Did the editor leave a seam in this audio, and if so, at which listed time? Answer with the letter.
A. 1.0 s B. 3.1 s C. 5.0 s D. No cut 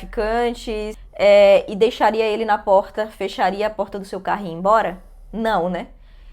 A